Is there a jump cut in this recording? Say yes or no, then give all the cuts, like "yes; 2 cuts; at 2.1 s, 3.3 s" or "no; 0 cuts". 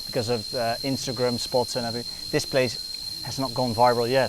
no; 0 cuts